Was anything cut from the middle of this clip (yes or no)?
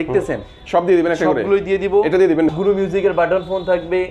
yes